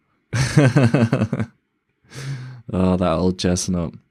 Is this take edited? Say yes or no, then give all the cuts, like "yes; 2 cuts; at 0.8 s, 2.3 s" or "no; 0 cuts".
no; 0 cuts